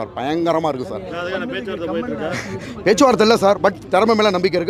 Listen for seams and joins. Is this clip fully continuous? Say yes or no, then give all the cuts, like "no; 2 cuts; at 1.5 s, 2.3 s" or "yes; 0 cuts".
yes; 0 cuts